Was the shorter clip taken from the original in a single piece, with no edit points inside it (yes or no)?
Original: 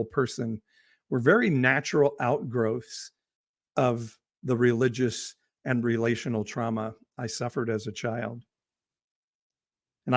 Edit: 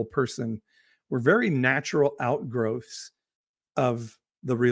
yes